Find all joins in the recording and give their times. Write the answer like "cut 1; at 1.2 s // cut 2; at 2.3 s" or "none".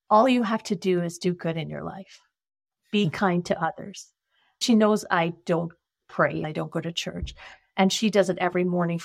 cut 1; at 4.6 s // cut 2; at 6.4 s